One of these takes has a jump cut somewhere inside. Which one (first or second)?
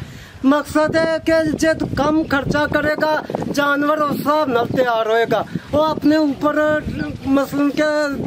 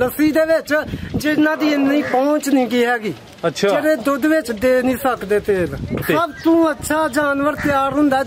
second